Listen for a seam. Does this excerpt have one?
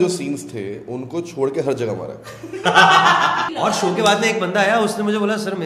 yes; 1 cut; at 3.5 s

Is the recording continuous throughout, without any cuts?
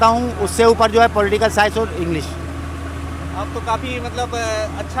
yes; 0 cuts

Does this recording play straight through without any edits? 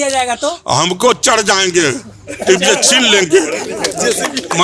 yes; 0 cuts

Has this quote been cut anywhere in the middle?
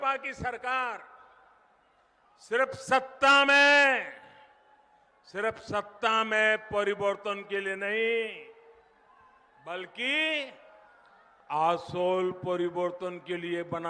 no; 0 cuts

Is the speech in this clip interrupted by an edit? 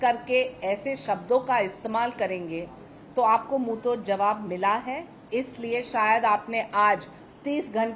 no; 0 cuts

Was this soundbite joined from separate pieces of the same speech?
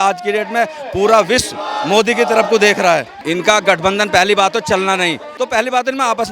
yes; 2 cuts; at 3.1 s, 5.3 s

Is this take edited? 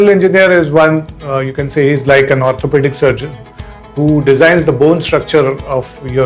no; 0 cuts

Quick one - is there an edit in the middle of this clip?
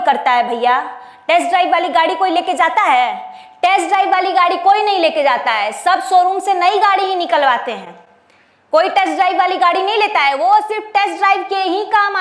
no; 0 cuts

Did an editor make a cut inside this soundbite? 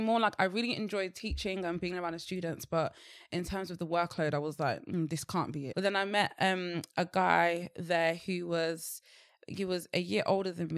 yes; 1 cut; at 5.6 s

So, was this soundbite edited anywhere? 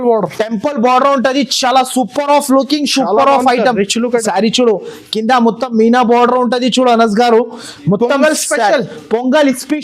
yes; 1 cut; at 4.2 s

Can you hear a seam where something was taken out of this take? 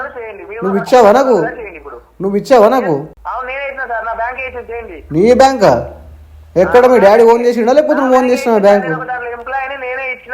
yes; 1 cut; at 3.1 s

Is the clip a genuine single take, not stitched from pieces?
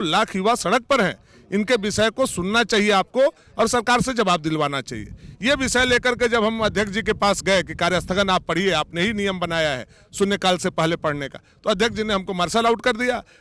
yes; 0 cuts

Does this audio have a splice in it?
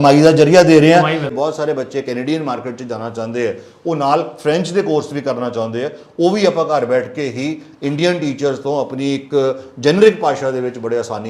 yes; 1 cut; at 1.3 s

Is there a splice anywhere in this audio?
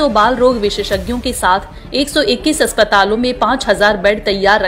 no; 0 cuts

